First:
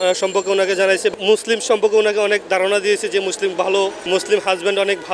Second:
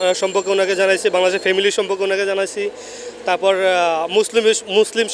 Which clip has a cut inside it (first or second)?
first